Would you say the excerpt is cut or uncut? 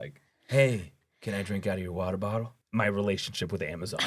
cut